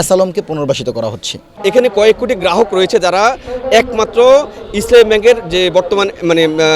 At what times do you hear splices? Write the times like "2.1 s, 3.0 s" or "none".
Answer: 1.5 s